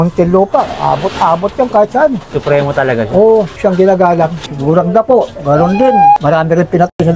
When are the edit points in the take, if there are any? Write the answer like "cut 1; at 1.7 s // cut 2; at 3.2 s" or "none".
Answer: cut 1; at 2.3 s // cut 2; at 3.5 s // cut 3; at 4.5 s // cut 4; at 6.2 s